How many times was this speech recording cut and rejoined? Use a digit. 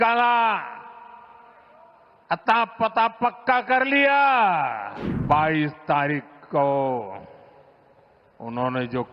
1